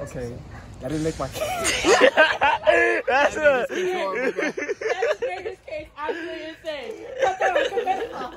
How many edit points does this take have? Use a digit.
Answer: 0